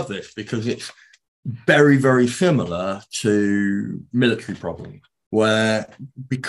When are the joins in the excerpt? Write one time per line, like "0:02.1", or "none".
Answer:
none